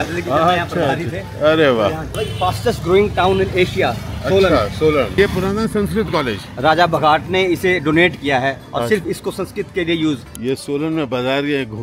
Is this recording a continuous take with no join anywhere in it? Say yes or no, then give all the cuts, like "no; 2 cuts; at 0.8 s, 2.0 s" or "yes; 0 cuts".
no; 3 cuts; at 2.1 s, 5.2 s, 10.3 s